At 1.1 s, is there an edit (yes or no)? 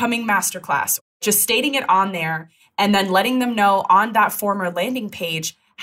yes